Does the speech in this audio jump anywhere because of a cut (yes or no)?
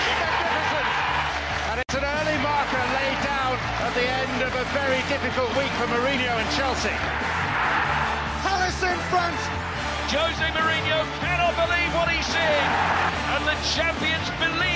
yes